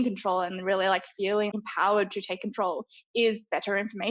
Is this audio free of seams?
no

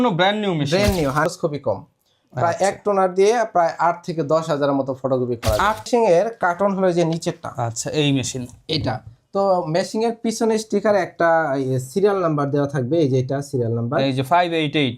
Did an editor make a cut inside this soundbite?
yes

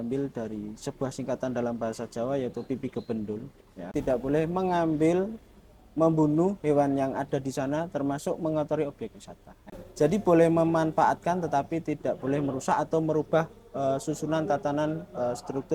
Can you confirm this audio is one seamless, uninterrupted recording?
no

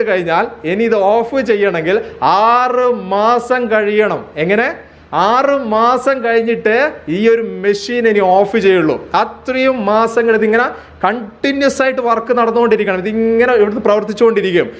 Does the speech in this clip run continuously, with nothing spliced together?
yes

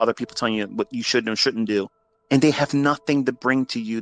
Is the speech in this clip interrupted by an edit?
no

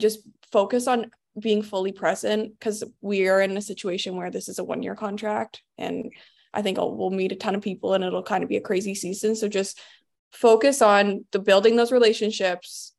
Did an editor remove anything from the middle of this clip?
no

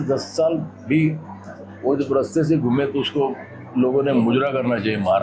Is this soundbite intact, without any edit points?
yes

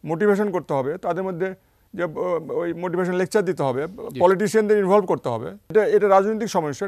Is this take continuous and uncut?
no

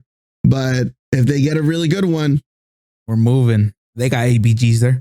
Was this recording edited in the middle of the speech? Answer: yes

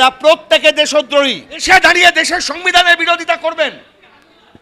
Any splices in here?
yes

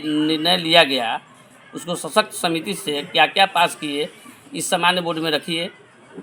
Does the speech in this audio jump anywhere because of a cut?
no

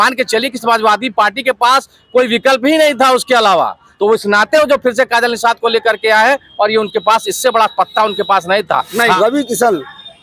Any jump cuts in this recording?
yes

